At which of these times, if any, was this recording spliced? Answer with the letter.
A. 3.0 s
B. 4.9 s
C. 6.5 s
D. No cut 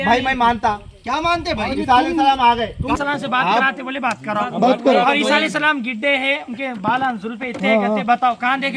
A